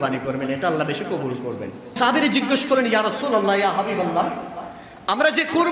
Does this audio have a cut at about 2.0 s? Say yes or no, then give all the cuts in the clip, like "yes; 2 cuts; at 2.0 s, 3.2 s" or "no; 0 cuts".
yes; 1 cut; at 2.0 s